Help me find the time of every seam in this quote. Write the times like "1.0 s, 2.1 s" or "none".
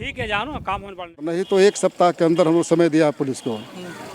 1.3 s